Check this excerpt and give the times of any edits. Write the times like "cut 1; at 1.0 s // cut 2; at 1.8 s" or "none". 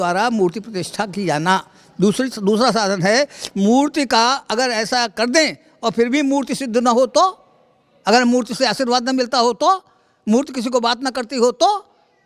none